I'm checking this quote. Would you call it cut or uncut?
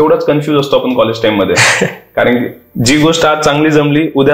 uncut